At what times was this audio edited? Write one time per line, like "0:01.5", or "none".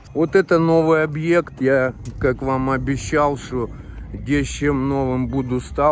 none